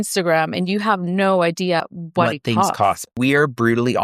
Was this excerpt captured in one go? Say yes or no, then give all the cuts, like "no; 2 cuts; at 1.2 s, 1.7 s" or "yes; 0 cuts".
no; 2 cuts; at 1.8 s, 3.1 s